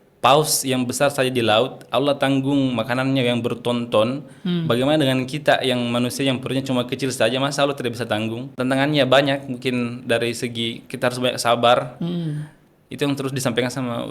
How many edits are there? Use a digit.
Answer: 1